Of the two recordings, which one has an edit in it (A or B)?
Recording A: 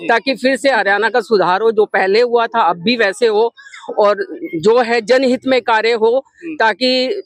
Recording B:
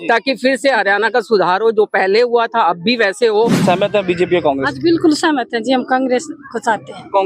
B